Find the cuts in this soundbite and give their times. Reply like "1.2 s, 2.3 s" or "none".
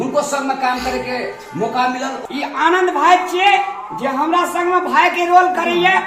2.2 s